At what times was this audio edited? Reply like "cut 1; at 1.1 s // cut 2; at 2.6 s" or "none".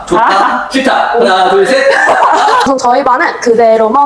cut 1; at 2.7 s

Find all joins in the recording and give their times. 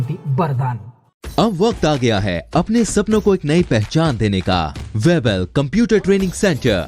cut 1; at 4.8 s

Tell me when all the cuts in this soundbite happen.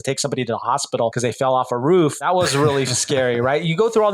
cut 1; at 1.1 s // cut 2; at 2.2 s

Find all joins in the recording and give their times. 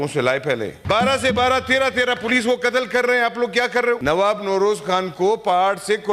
cut 1; at 0.8 s // cut 2; at 4.0 s

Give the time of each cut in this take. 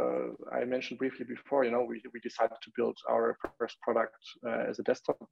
none

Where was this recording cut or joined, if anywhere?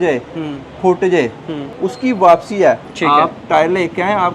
cut 1; at 1.6 s // cut 2; at 2.9 s

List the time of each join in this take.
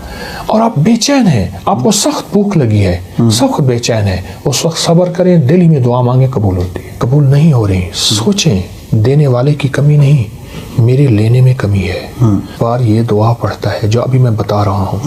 cut 1; at 7.0 s // cut 2; at 12.5 s

